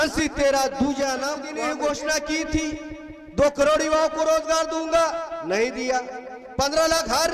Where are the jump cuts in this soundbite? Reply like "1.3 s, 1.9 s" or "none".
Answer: 1.5 s